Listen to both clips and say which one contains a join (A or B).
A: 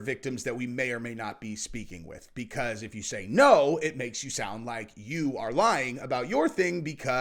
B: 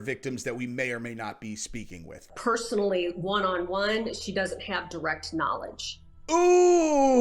B